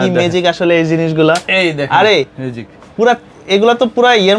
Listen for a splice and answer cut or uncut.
uncut